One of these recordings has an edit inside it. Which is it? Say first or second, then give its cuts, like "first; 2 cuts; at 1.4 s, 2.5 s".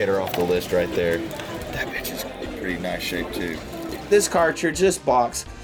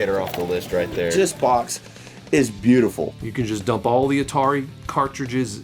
second; 2 cuts; at 1.1 s, 3.1 s